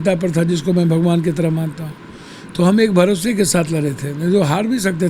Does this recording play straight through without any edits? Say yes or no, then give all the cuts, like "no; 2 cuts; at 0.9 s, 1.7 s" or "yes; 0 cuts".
yes; 0 cuts